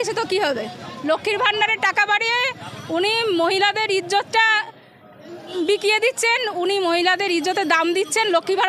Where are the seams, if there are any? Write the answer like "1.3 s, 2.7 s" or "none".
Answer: none